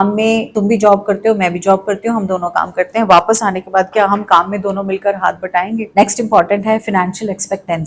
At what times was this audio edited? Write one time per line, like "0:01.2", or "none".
0:05.9